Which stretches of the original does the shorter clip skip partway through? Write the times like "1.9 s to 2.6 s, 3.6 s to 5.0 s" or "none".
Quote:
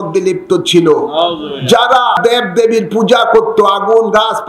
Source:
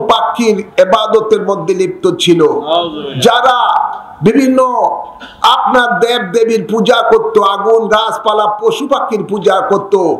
3.7 s to 6.0 s